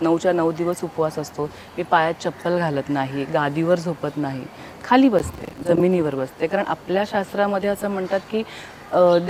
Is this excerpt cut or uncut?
uncut